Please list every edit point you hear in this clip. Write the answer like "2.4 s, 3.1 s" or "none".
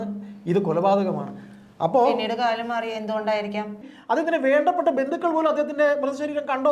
3.9 s